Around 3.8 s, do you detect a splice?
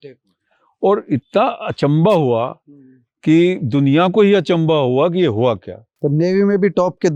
no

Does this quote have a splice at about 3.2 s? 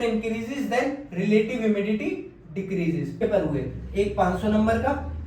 yes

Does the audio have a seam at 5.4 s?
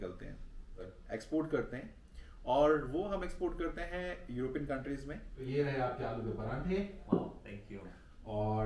yes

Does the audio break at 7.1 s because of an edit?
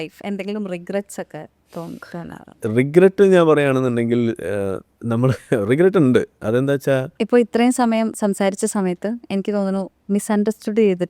yes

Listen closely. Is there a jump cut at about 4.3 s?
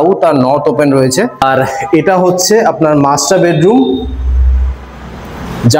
no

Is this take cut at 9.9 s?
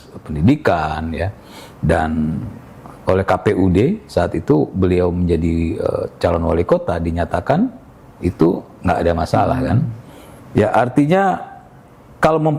no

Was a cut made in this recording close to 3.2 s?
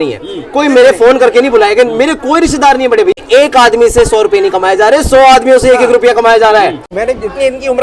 yes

